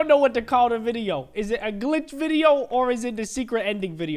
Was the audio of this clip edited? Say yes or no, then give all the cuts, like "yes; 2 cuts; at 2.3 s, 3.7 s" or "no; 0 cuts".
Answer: no; 0 cuts